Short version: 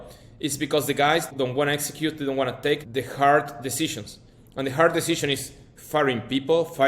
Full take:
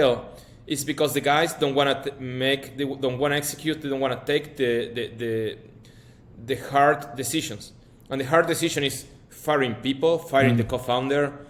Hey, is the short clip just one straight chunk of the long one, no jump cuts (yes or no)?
no